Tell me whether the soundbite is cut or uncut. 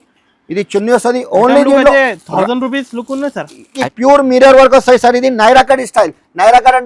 cut